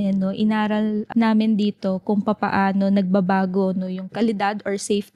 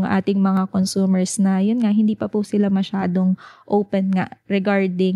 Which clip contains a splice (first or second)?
first